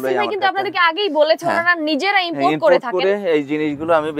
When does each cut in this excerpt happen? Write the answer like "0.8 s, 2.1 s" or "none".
none